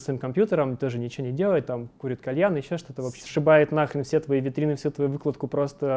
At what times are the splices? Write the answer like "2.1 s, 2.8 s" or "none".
3.2 s